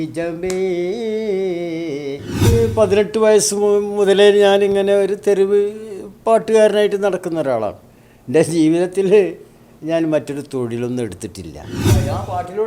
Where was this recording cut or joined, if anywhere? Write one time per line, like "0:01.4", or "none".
0:02.5
0:11.9